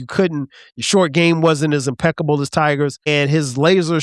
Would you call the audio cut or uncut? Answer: cut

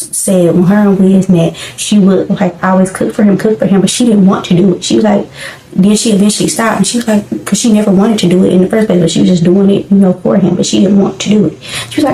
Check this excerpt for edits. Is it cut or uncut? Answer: uncut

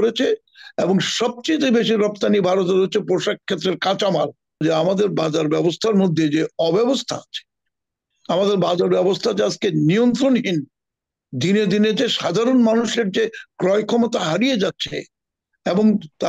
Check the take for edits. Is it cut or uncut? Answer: cut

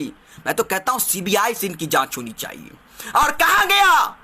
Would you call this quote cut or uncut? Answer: uncut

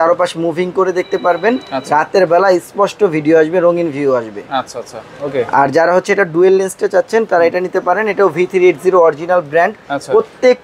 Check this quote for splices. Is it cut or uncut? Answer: uncut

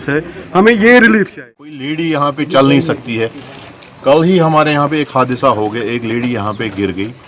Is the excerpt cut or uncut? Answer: cut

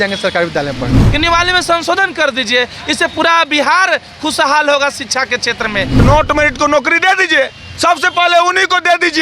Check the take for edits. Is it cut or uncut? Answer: cut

